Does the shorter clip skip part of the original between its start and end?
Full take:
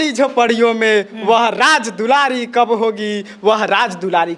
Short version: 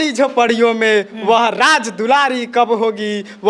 no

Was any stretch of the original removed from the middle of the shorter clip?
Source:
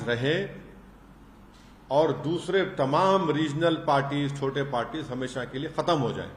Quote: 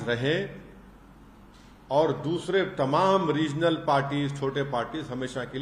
no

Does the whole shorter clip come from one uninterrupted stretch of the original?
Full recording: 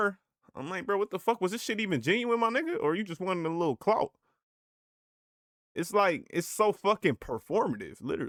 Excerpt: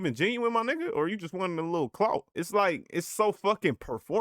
no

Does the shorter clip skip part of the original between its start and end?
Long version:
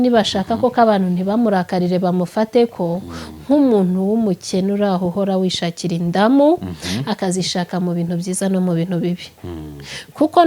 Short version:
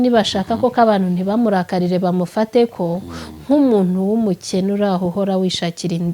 no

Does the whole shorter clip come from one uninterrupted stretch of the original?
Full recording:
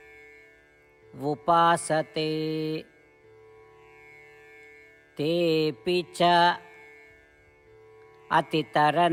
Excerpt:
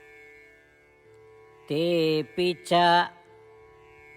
no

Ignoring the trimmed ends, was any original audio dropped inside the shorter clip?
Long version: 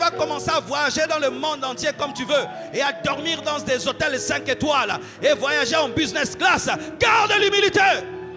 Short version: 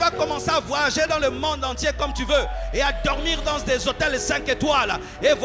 no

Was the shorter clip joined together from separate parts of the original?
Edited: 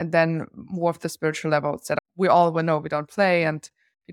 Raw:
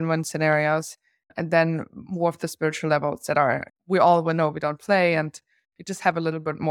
yes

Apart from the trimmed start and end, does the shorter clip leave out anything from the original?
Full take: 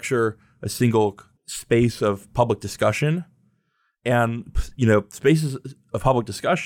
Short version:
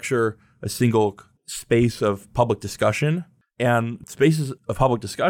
yes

